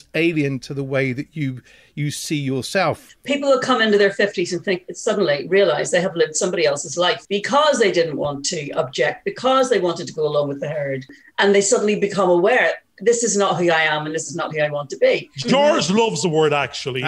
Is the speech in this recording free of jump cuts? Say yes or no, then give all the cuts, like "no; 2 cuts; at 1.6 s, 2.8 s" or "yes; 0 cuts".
no; 4 cuts; at 3.1 s, 7.2 s, 11.2 s, 15.3 s